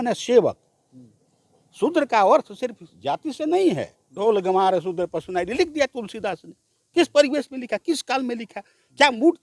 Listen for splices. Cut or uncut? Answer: cut